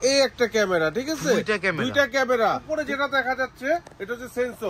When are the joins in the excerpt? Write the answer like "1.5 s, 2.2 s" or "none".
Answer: 2.6 s